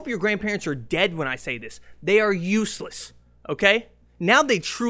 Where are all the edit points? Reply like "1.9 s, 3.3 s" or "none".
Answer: none